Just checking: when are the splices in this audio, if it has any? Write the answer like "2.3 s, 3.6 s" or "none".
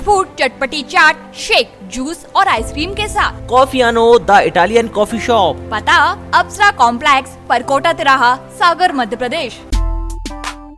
9.6 s

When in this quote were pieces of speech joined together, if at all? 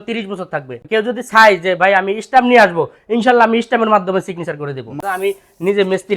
0.8 s, 4.9 s

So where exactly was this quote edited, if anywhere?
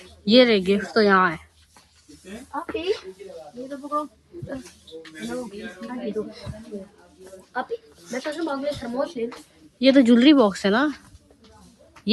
none

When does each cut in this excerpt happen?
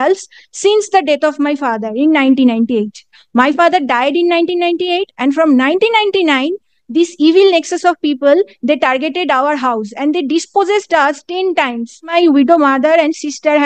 12.0 s

